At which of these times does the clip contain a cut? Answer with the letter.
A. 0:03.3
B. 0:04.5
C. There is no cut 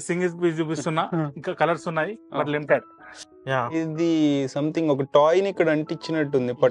A